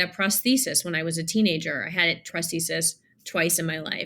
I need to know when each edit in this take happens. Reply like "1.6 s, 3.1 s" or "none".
2.3 s

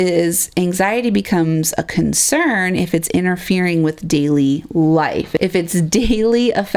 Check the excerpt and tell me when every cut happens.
none

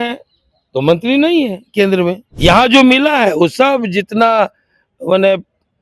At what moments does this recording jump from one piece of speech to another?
2.3 s

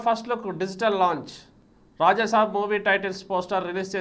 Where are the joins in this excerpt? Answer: none

